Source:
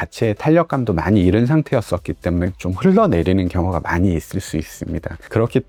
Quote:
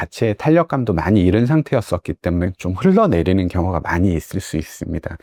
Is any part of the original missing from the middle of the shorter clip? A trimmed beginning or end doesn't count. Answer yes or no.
no